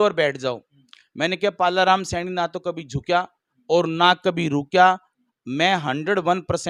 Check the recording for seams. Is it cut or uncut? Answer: uncut